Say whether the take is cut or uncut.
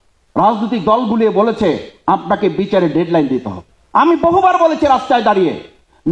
uncut